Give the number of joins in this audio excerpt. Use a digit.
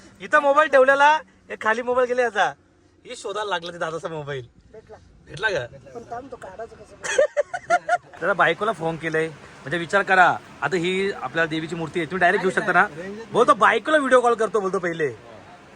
1